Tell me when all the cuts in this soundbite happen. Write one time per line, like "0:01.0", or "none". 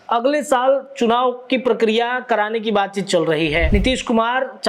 0:03.7